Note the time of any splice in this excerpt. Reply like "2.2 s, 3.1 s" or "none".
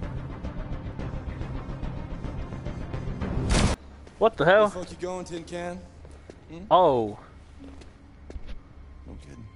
3.7 s